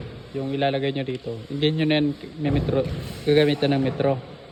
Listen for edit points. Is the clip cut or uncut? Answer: uncut